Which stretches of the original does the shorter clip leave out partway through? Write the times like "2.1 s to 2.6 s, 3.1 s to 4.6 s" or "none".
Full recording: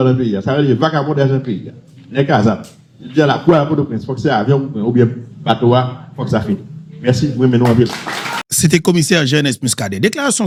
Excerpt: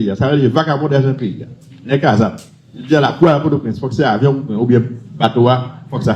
none